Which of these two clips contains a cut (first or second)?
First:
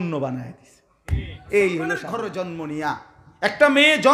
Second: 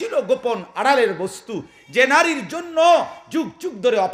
first